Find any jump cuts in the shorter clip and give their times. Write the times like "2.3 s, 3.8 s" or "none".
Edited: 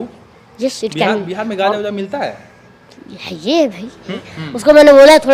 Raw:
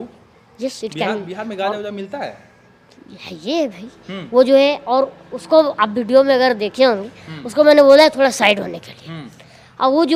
4.2 s